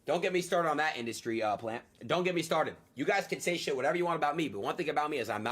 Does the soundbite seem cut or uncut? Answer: cut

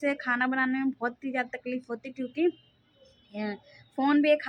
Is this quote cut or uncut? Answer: uncut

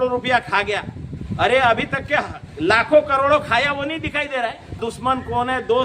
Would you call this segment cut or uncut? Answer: cut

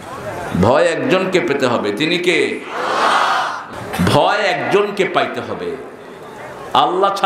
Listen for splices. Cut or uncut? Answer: cut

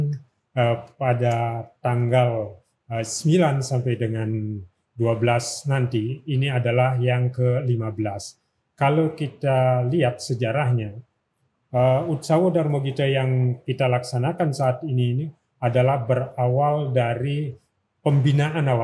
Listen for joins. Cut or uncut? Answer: uncut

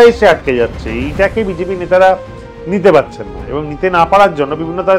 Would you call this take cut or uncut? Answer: uncut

